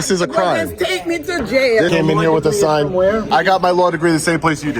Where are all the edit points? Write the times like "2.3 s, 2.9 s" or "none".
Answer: 1.9 s, 3.3 s